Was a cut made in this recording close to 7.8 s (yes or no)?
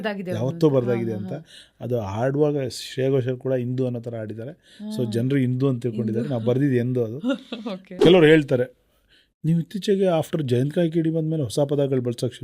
yes